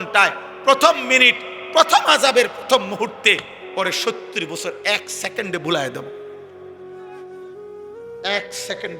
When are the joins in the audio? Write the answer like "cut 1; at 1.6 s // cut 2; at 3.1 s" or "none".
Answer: cut 1; at 6.0 s // cut 2; at 7.6 s